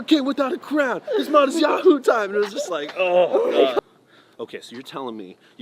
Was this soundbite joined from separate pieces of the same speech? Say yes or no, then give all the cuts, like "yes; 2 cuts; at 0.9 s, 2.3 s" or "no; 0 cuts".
yes; 1 cut; at 3.8 s